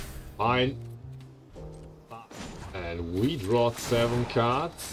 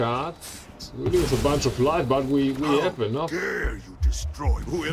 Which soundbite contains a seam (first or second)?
first